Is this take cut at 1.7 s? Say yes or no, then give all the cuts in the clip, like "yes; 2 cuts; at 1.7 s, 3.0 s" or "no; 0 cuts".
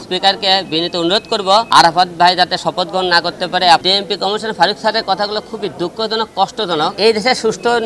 yes; 3 cuts; at 1.7 s, 3.8 s, 6.9 s